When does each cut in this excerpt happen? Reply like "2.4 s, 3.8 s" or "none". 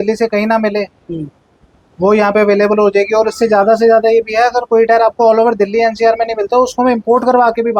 none